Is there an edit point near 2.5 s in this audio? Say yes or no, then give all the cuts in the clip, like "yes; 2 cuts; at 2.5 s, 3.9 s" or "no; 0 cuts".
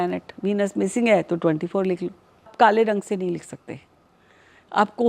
yes; 1 cut; at 2.5 s